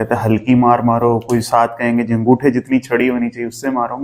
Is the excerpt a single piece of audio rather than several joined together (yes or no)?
yes